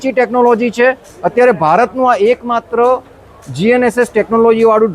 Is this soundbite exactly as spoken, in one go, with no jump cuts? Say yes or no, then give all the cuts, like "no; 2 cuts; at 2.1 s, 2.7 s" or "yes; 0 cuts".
no; 1 cut; at 1.1 s